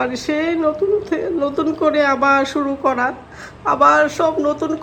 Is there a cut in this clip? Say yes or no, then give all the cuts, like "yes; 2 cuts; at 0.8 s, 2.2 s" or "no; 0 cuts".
no; 0 cuts